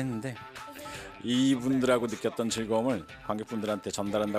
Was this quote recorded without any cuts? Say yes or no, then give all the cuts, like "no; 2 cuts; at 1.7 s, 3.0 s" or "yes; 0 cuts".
no; 1 cut; at 1.1 s